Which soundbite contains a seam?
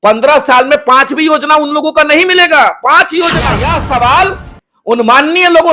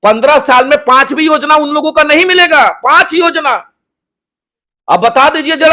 first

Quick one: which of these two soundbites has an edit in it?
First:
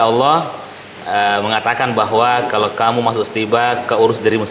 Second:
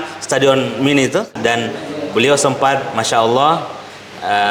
second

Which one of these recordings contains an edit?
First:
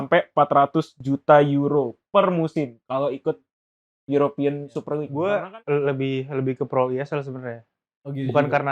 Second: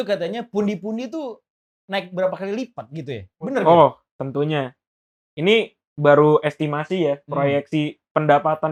first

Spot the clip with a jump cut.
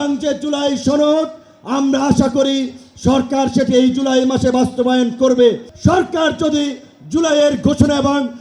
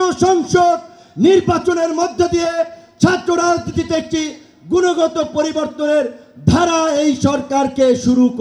first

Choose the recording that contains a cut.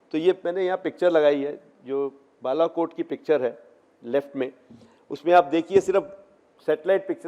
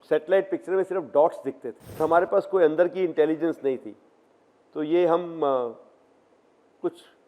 second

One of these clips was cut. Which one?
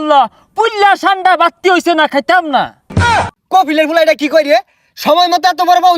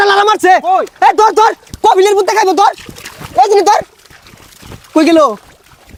first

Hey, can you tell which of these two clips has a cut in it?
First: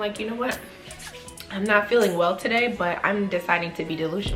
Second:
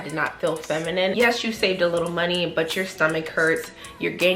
second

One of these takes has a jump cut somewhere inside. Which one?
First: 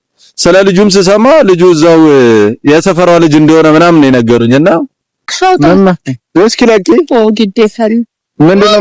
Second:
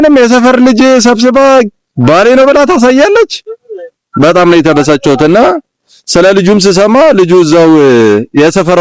first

